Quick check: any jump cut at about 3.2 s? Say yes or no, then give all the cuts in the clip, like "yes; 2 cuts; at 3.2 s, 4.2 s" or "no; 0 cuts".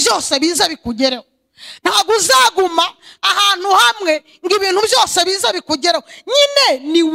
no; 0 cuts